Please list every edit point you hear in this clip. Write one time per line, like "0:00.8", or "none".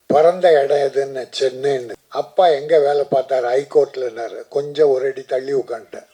0:02.0